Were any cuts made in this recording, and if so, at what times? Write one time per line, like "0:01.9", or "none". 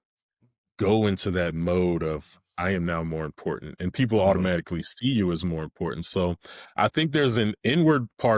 none